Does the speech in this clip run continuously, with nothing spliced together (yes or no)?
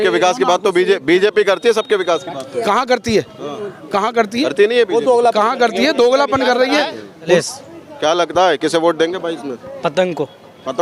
no